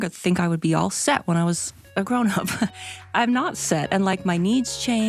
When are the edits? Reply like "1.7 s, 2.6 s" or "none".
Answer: none